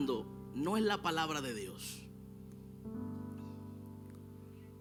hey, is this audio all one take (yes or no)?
yes